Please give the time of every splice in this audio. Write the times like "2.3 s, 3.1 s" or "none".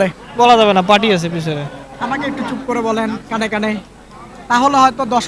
none